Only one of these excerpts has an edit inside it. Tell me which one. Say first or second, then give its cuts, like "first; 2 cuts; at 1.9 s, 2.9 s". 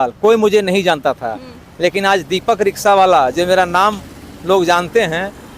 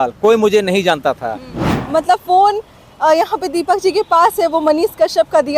second; 1 cut; at 1.7 s